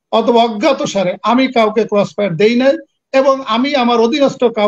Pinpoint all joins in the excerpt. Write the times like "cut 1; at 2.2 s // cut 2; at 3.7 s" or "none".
none